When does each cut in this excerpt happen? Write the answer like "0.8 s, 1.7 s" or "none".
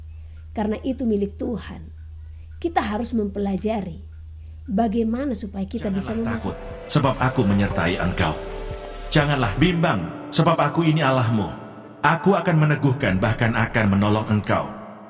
6.5 s